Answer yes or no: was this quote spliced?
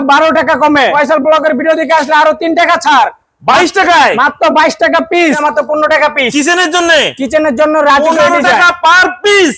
yes